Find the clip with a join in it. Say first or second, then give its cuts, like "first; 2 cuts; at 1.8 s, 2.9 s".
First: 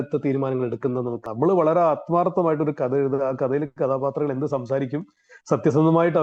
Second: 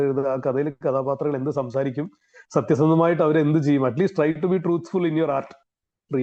first; 1 cut; at 1.1 s